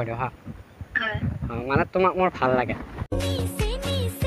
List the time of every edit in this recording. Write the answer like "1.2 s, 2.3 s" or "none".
2.9 s